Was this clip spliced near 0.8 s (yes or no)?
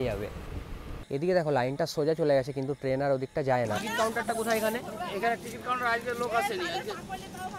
yes